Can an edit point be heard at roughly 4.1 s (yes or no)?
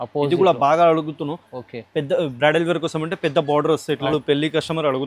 yes